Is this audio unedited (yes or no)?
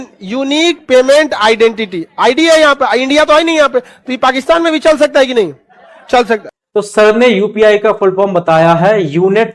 yes